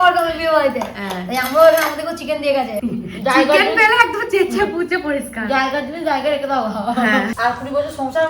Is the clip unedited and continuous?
no; 2 cuts; at 2.8 s, 7.4 s

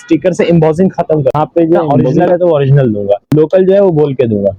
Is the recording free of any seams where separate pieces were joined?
no; 2 cuts; at 2.1 s, 3.3 s

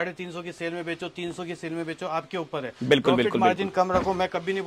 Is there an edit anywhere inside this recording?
no; 0 cuts

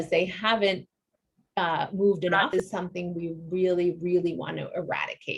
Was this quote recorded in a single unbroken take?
no; 1 cut; at 2.5 s

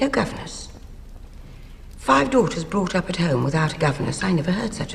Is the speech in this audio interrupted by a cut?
no; 0 cuts

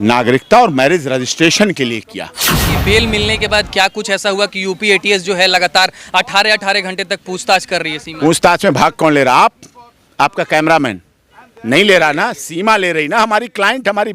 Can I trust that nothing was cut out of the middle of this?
no; 1 cut; at 2.7 s

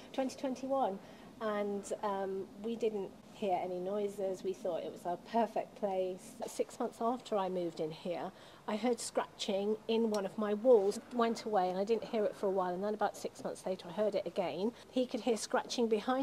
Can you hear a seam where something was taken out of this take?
yes; 3 cuts; at 6.5 s, 11.0 s, 14.8 s

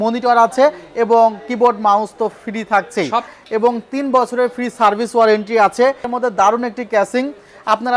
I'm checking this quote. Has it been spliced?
yes; 2 cuts; at 3.4 s, 6.1 s

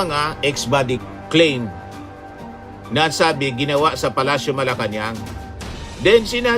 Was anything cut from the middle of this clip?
yes; 1 cut; at 1.0 s

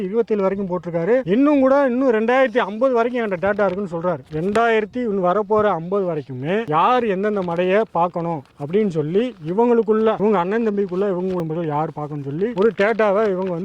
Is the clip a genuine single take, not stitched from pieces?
no; 1 cut; at 11.4 s

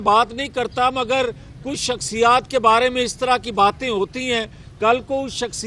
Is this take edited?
no; 0 cuts

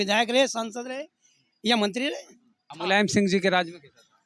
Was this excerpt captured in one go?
no; 1 cut; at 2.7 s

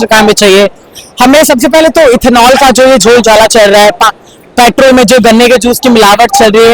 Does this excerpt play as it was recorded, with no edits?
yes; 0 cuts

